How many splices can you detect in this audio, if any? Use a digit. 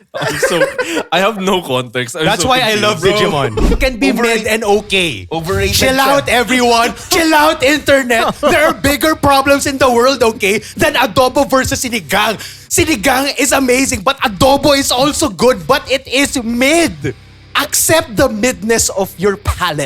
1